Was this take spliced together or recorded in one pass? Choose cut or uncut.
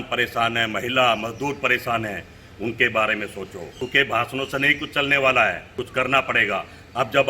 cut